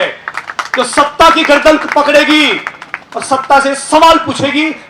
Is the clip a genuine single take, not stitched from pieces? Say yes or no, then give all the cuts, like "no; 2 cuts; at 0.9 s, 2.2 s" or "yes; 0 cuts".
yes; 0 cuts